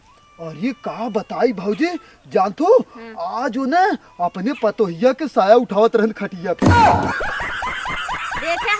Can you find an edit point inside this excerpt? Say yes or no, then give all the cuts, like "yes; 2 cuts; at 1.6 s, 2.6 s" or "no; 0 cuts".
no; 0 cuts